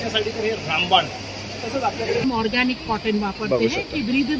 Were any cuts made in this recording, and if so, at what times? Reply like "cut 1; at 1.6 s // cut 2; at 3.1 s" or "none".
cut 1; at 2.2 s